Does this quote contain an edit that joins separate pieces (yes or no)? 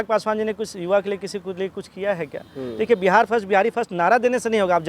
no